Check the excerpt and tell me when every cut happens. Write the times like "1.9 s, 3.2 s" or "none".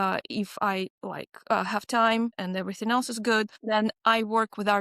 1.0 s, 2.4 s, 3.6 s